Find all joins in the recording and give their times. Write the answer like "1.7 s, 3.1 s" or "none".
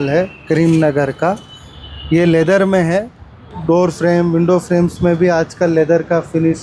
3.4 s